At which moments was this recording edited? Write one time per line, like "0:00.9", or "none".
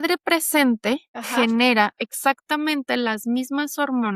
0:01.2